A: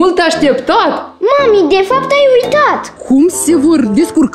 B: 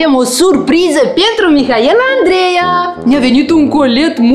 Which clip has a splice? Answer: A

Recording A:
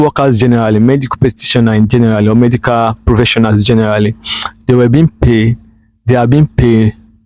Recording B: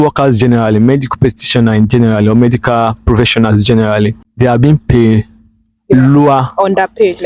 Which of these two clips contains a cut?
B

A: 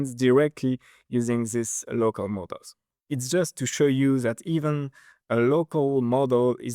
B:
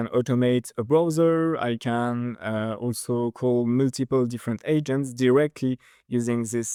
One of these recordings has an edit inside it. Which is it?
A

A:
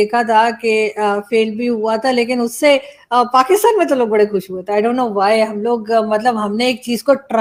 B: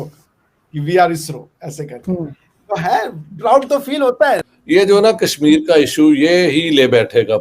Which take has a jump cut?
B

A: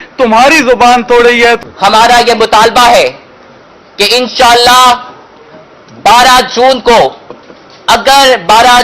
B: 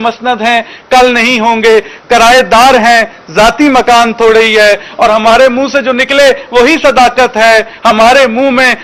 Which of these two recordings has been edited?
A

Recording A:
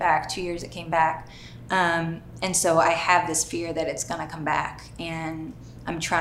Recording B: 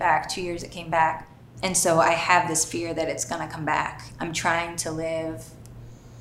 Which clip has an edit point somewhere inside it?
B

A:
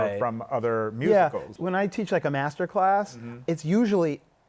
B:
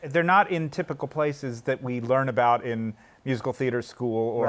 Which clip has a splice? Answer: A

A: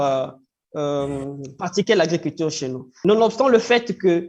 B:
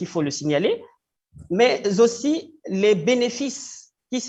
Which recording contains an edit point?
A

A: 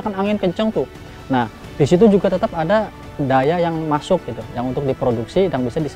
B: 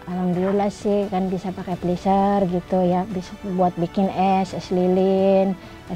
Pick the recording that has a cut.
A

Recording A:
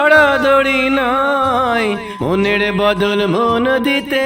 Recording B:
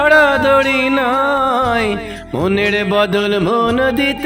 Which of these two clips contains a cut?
A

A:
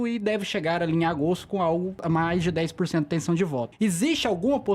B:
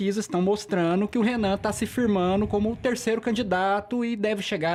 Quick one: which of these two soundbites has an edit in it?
A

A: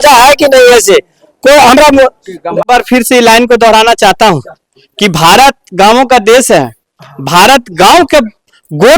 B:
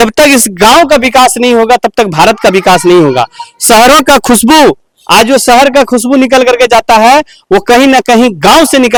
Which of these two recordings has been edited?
A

